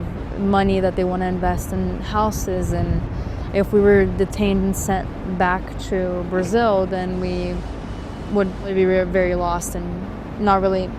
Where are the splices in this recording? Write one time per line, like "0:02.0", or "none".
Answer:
0:08.7